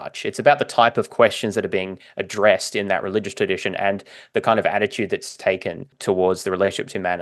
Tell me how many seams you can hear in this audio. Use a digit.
1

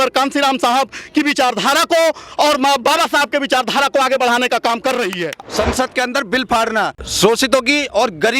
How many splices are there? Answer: 2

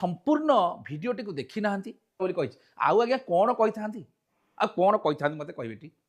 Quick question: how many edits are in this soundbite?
1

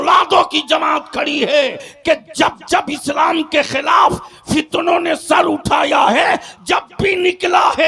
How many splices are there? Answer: 2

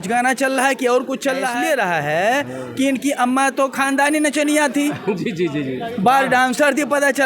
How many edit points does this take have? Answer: 1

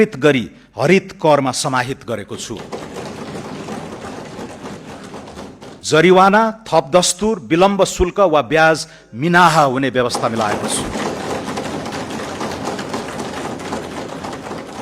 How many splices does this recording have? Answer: 1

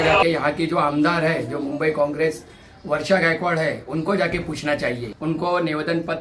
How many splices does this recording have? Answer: 1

